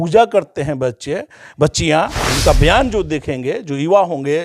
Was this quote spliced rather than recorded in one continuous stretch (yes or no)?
yes